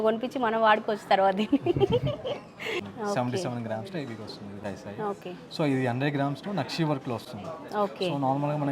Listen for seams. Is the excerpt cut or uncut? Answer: cut